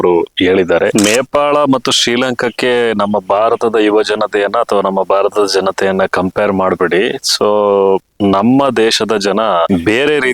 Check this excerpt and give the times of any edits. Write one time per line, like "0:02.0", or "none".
0:00.9